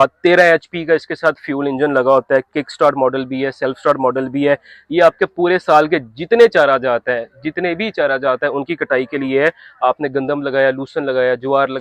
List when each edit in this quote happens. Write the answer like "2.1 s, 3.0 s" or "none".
none